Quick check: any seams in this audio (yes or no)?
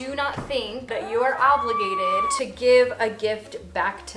yes